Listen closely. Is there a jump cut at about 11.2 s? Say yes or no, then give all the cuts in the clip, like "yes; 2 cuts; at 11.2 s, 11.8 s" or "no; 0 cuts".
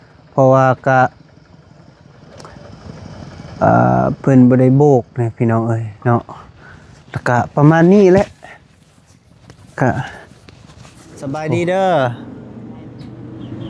yes; 1 cut; at 11.2 s